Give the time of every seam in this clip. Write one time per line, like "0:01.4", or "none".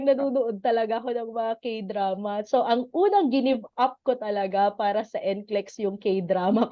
none